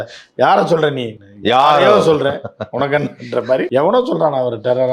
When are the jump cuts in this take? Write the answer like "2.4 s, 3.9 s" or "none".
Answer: 3.7 s